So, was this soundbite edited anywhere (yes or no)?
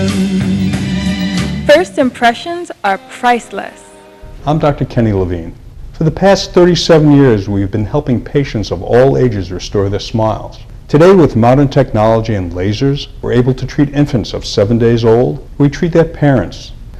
no